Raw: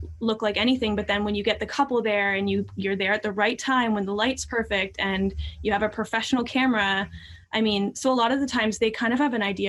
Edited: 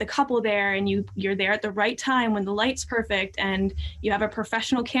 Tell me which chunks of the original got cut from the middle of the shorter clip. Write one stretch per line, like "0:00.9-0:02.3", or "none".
none